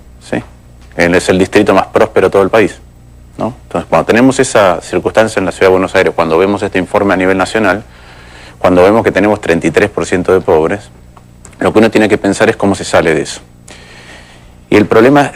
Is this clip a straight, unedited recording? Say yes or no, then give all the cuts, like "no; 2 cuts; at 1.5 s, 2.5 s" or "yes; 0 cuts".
no; 1 cut; at 4.0 s